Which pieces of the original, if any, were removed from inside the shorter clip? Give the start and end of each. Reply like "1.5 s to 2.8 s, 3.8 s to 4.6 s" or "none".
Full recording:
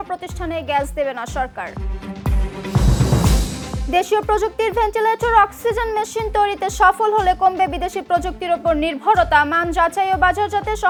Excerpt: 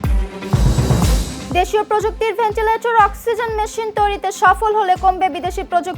3.6 s to 3.7 s